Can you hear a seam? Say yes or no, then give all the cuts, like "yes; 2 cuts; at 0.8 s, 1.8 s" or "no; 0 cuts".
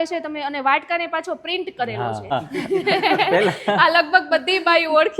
yes; 1 cut; at 2.3 s